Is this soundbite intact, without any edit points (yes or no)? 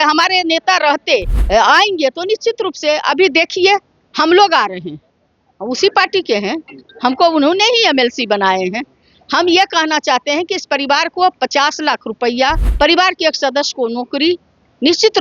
no